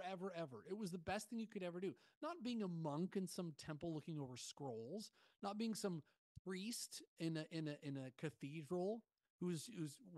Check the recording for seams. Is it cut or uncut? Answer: uncut